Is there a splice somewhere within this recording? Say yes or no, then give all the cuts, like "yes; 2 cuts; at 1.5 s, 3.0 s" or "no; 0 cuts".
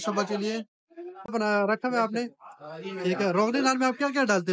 yes; 1 cut; at 1.3 s